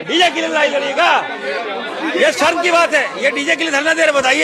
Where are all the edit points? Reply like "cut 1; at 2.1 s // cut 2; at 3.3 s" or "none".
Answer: cut 1; at 2.0 s